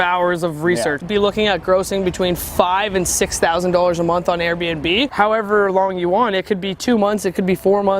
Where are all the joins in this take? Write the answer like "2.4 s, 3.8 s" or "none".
1.0 s, 5.1 s

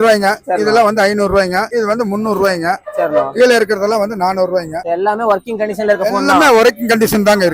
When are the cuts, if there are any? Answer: none

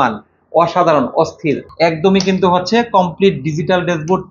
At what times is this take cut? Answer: 1.7 s

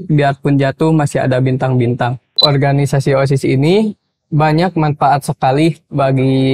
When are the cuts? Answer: 2.4 s

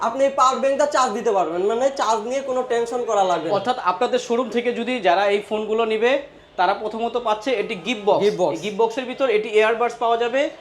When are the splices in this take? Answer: none

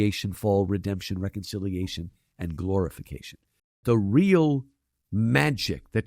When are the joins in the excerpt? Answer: 3.8 s

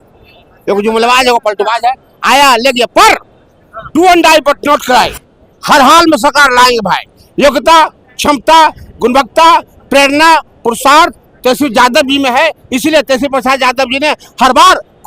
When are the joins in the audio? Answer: none

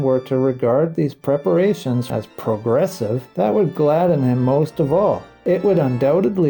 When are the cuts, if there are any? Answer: 2.1 s, 3.3 s, 5.3 s

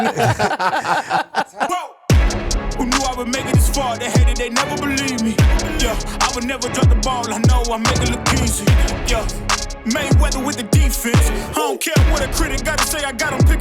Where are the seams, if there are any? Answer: 1.5 s

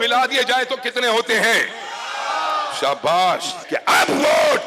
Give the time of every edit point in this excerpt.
3.6 s

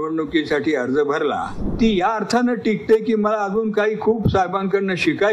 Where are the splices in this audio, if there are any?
1.6 s

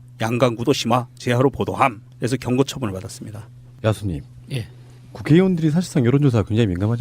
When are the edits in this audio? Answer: 2.0 s

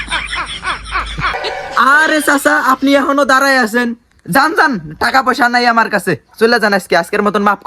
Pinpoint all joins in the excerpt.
1.3 s

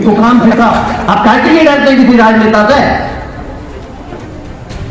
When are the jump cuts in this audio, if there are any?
1.0 s

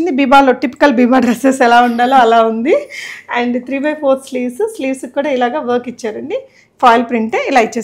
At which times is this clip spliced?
none

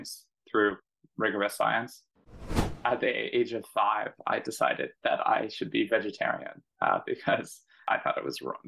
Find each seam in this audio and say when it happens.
2.5 s, 7.7 s

